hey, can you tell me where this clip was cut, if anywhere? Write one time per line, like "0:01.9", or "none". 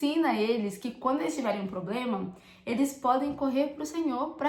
none